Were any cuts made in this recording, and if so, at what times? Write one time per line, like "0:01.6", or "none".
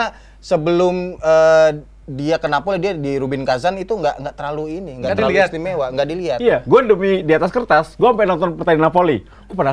none

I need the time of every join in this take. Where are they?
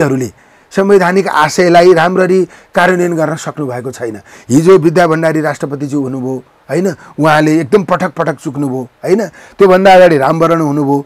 none

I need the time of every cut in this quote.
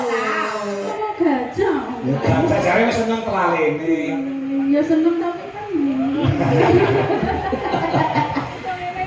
0:00.9

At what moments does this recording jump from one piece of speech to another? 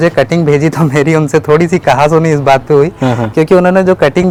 none

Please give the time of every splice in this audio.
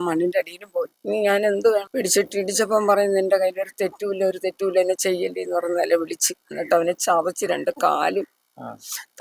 0:01.9

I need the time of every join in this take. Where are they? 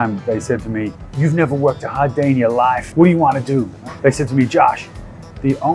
0:01.0
0:02.8
0:03.8

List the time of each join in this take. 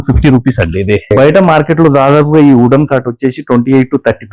0:01.1

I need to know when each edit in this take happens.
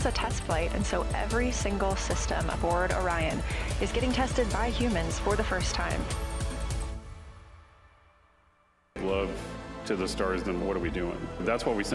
0:09.0

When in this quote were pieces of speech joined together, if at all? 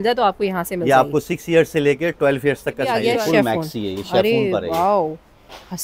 0:02.9

